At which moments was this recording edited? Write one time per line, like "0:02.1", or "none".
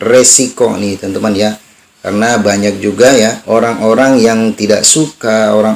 0:03.4